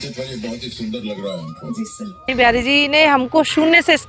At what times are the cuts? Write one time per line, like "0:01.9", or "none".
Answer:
0:02.3